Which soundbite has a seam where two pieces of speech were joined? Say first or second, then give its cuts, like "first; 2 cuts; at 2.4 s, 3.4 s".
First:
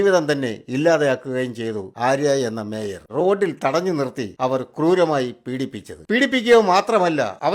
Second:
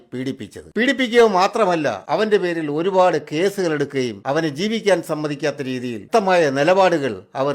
first; 1 cut; at 3.0 s